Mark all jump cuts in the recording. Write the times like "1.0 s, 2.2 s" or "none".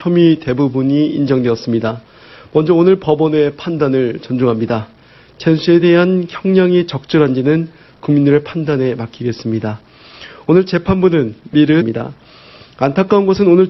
none